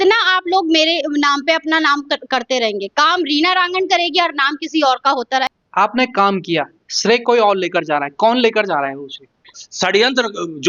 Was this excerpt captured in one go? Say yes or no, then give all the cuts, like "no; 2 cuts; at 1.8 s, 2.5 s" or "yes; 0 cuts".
no; 2 cuts; at 5.6 s, 9.6 s